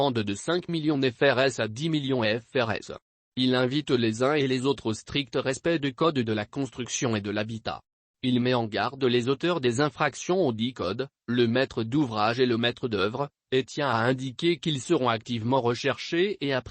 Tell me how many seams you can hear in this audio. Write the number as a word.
one